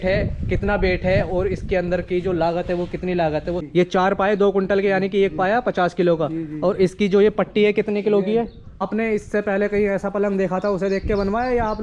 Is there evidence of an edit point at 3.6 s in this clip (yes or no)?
yes